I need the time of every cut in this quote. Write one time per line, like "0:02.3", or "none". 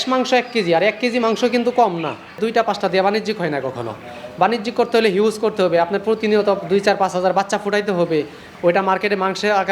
0:02.4

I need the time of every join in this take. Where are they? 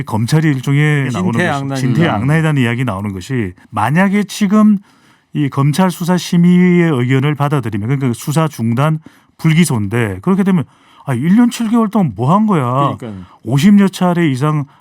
0:01.1
0:03.6

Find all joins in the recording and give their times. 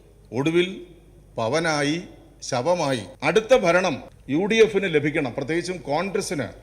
0:03.1
0:04.1

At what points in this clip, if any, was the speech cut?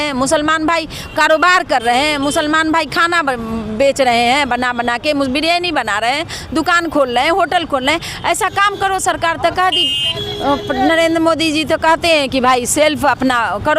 none

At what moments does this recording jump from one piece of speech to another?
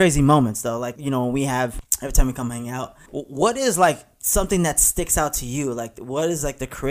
0:01.0
0:01.9
0:03.0

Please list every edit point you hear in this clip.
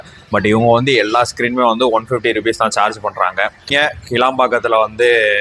0:03.7

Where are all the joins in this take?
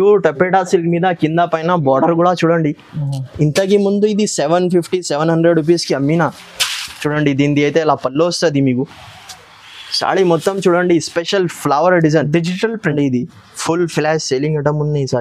0:12.9

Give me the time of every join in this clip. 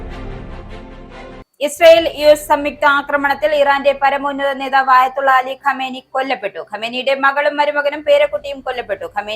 0:01.4

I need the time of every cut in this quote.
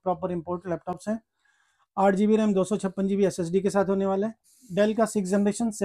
0:04.5

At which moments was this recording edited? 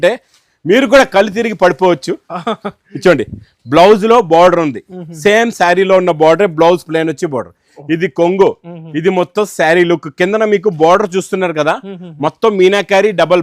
none

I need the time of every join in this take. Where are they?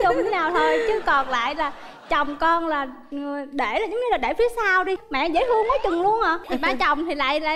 0:05.1
0:06.4

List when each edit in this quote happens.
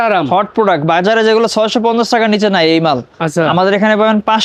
none

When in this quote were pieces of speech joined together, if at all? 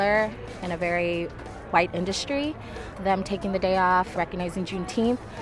0:01.3
0:03.0
0:04.1

